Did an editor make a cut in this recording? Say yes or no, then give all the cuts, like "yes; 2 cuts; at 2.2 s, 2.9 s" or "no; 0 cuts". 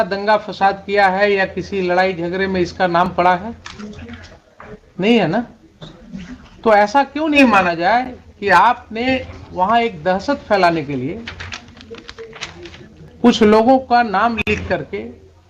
no; 0 cuts